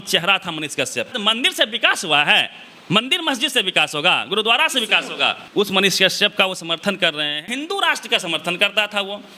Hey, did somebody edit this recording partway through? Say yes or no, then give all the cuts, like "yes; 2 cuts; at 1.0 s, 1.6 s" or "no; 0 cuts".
yes; 3 cuts; at 1.1 s, 5.4 s, 7.4 s